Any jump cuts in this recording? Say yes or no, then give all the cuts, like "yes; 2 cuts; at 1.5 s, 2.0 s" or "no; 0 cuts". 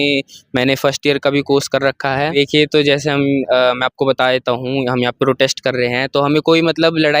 yes; 1 cut; at 2.4 s